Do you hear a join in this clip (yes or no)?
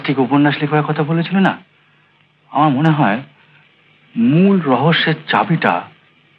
no